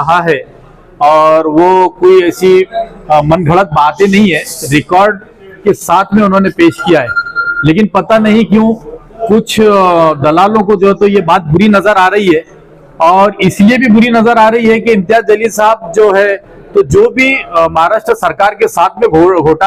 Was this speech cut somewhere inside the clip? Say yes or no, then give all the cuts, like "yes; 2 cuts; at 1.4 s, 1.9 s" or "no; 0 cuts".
no; 0 cuts